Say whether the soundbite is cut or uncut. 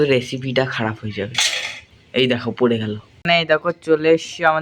cut